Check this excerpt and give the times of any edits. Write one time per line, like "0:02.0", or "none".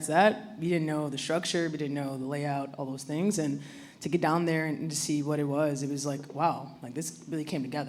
none